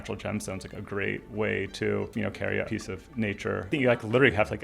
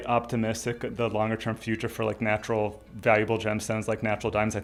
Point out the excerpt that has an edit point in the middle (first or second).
first